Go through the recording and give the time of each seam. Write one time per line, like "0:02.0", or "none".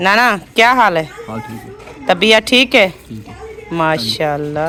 none